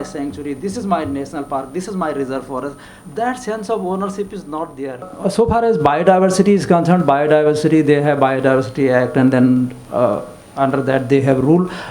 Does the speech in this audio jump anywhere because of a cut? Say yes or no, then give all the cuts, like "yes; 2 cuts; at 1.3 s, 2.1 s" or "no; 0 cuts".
yes; 1 cut; at 5.1 s